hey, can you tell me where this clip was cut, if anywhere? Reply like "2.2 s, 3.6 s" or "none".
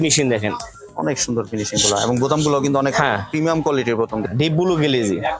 4.2 s